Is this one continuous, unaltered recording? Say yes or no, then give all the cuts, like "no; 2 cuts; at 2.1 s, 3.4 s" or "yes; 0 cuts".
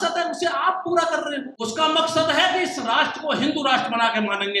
no; 1 cut; at 1.6 s